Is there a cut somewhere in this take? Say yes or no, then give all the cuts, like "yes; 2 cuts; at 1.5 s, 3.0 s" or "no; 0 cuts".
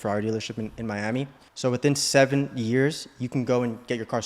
yes; 1 cut; at 1.4 s